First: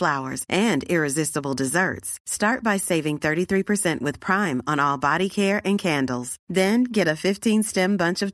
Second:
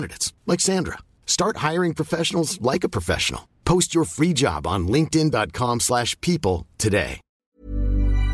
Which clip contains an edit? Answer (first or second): second